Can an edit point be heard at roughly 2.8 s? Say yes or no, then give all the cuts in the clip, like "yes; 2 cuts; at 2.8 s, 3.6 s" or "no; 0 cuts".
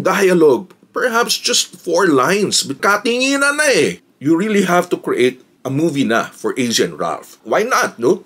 yes; 3 cuts; at 2.8 s, 4.0 s, 7.4 s